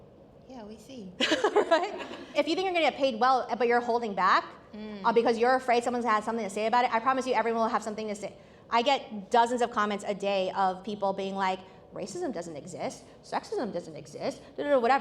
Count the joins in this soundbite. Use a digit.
1